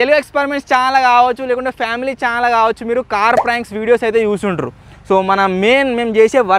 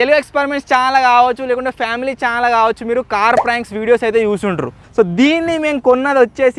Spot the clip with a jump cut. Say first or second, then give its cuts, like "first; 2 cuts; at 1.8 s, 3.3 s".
second; 1 cut; at 4.8 s